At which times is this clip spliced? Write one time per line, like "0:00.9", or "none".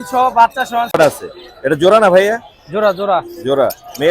0:01.0

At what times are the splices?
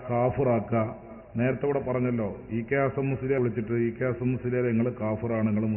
0:03.4

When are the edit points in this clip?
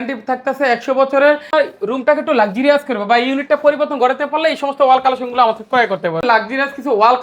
0:01.5
0:06.2

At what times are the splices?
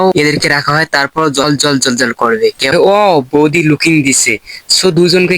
0:02.7

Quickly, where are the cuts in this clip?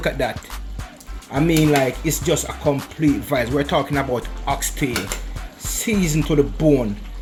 none

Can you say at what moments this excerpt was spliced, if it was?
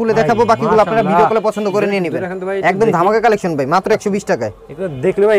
none

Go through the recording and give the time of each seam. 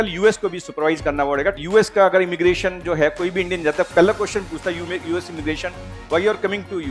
0:01.6

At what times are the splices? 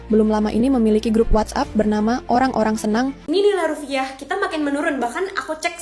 0:03.2

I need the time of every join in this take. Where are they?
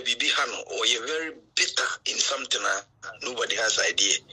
none

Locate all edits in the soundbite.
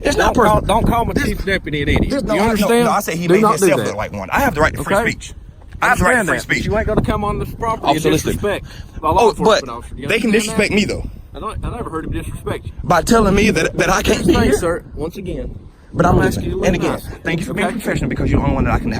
none

